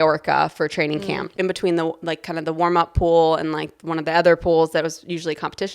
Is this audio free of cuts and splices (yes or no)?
no